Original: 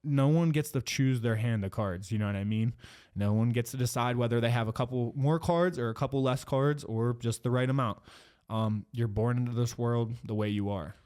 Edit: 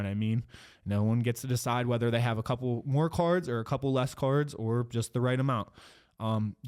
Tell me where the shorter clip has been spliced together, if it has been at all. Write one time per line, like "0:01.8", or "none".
none